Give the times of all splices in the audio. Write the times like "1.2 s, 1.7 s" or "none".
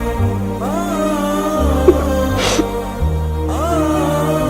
none